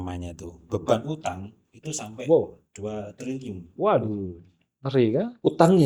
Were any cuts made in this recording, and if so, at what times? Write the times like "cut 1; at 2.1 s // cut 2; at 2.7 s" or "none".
none